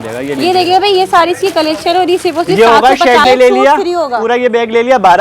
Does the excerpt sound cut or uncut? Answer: cut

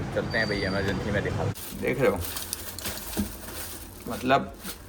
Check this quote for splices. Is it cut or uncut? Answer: cut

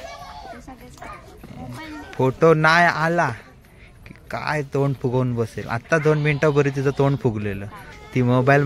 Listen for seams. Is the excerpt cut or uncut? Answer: cut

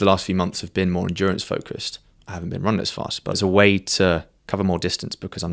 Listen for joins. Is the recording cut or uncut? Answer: cut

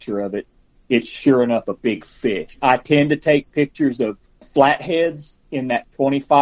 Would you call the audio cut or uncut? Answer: cut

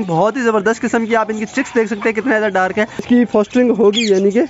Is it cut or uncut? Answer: cut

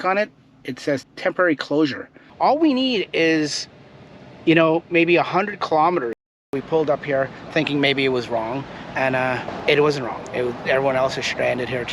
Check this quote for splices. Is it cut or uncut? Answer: cut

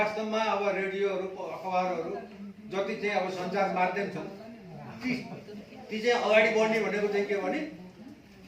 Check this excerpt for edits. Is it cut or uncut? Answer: uncut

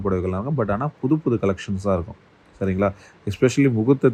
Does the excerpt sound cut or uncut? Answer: uncut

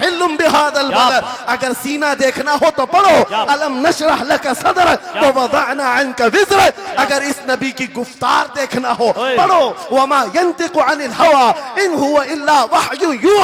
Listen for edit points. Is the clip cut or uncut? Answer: uncut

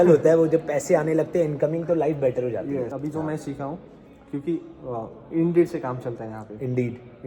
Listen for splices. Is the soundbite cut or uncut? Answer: cut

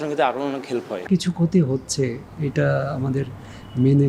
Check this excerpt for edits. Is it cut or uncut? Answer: cut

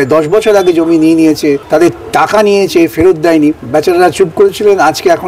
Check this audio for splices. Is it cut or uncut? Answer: cut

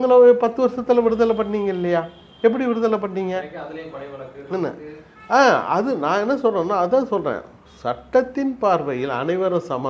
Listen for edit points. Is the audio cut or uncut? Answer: uncut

